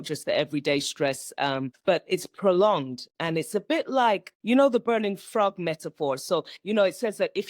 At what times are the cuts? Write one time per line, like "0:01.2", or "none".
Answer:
0:01.7
0:04.3